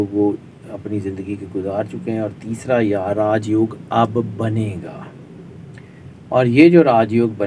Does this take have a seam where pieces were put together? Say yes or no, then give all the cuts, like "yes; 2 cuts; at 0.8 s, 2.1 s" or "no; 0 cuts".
no; 0 cuts